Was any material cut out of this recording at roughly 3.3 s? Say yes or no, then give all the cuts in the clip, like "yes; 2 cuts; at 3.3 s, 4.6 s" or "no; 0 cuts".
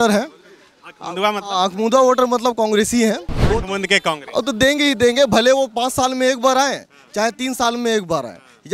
yes; 1 cut; at 3.3 s